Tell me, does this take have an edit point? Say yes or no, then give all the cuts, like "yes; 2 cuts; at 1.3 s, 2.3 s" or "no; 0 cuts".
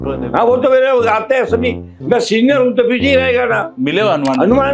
yes; 1 cut; at 3.8 s